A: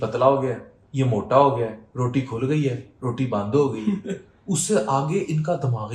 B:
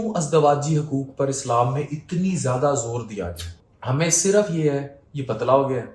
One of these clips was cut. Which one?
B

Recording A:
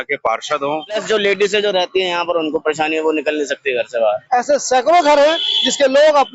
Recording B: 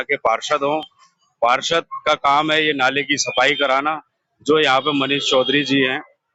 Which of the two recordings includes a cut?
A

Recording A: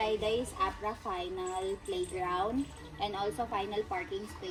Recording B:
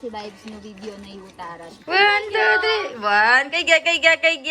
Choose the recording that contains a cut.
B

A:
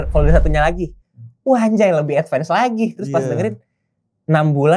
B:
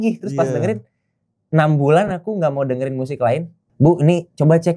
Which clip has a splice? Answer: B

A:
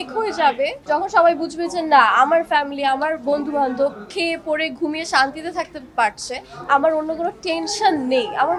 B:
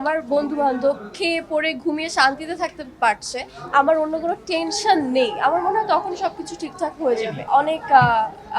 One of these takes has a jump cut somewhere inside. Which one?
B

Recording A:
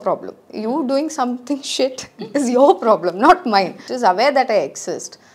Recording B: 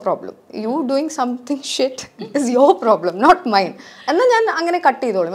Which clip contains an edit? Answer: A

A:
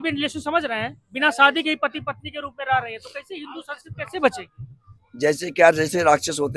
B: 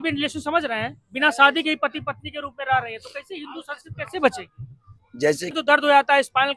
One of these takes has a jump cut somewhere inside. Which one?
B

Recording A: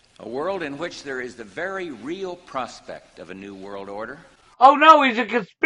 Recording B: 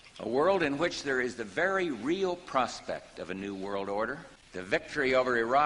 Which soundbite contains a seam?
B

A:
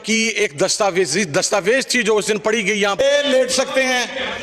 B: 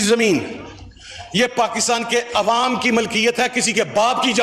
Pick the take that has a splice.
A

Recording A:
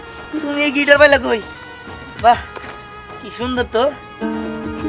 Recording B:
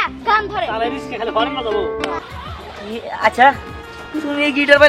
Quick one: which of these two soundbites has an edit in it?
B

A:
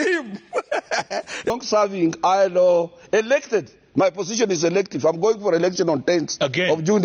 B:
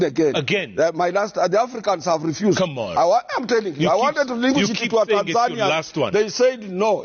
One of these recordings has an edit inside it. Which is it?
A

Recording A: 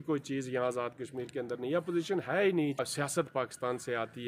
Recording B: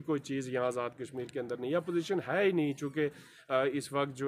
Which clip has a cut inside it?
A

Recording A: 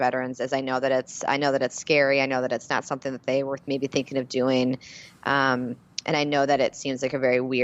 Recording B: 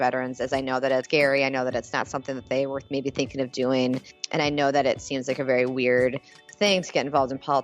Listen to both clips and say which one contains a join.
B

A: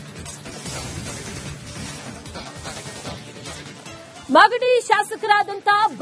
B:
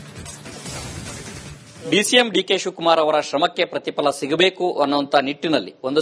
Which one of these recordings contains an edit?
B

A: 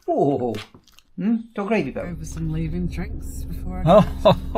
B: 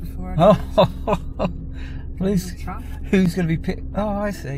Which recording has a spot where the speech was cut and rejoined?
A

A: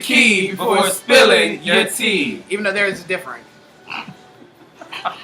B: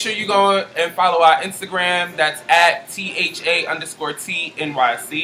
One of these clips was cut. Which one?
A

